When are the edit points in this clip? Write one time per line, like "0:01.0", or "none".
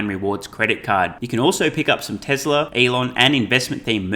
0:02.7